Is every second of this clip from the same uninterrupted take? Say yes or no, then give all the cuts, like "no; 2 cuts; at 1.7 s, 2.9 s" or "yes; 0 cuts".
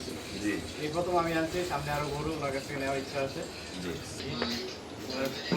no; 1 cut; at 4.3 s